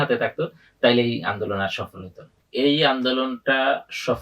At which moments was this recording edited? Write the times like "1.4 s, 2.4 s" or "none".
2.3 s